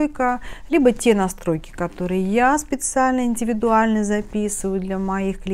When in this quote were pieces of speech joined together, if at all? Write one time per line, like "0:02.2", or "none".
none